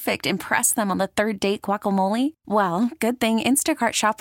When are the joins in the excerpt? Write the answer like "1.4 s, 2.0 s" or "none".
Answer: none